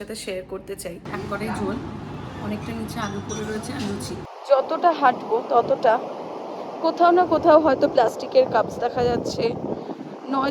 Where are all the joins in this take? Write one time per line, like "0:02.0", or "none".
0:01.1
0:04.3